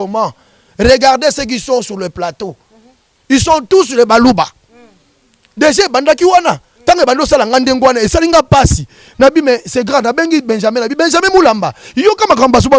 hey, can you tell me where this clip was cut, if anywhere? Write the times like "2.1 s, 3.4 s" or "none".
none